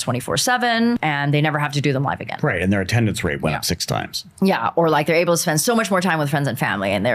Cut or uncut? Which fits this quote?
uncut